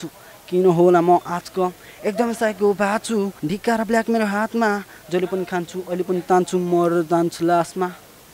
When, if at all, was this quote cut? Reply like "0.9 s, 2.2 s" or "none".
3.4 s